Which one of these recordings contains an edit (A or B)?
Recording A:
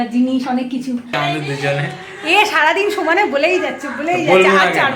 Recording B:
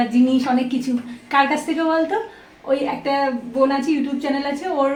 A